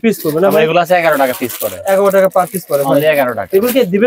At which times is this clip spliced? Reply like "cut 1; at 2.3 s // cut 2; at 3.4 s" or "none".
none